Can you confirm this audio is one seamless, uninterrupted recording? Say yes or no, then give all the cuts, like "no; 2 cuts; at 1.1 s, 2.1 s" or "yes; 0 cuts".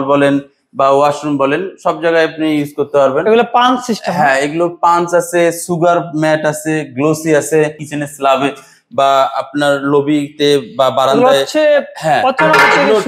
no; 1 cut; at 7.8 s